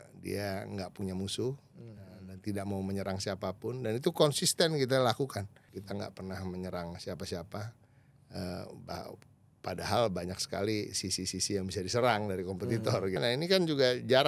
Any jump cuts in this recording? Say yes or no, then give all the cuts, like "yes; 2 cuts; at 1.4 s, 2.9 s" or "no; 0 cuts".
yes; 2 cuts; at 5.6 s, 13.2 s